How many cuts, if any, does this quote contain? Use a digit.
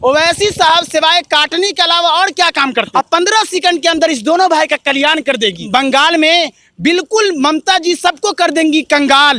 2